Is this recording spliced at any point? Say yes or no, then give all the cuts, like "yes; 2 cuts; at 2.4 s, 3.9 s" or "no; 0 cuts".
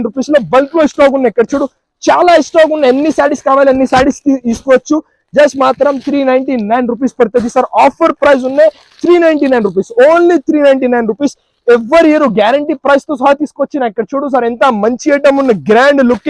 no; 0 cuts